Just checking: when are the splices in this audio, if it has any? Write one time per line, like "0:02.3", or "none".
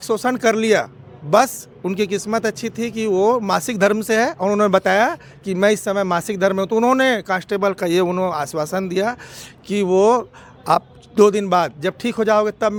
none

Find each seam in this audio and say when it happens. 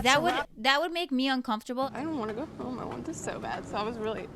0:01.9

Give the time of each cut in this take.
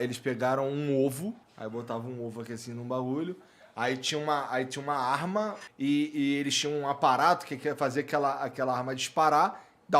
0:01.5
0:05.6

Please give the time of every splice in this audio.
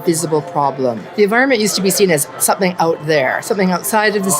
0:01.0

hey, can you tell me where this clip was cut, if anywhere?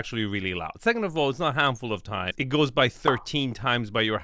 0:02.4

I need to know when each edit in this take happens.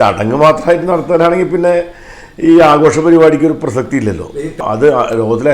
0:04.6

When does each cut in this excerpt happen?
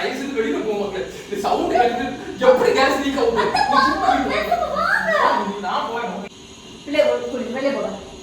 0:06.3

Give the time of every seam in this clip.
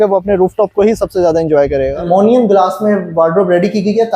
0:02.0

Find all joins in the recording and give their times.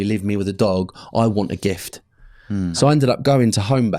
0:02.7

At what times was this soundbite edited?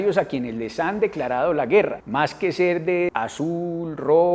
0:02.0
0:03.1

